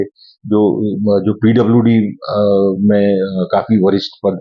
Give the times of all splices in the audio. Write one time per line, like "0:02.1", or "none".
none